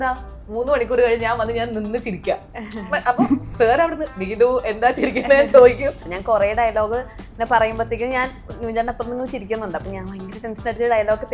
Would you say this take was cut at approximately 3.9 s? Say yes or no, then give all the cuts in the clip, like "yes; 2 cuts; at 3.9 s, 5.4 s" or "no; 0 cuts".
no; 1 cut; at 6.1 s